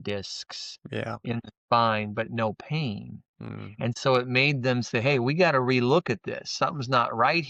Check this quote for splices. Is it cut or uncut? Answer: uncut